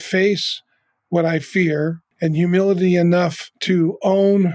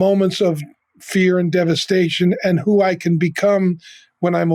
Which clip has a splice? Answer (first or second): first